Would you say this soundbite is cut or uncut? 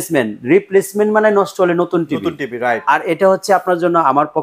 uncut